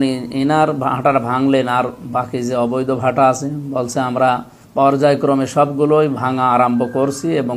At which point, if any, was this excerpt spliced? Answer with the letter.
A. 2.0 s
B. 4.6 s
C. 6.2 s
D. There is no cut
B